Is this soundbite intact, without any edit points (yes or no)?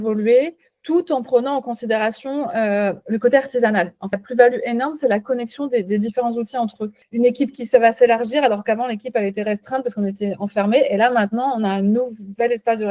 no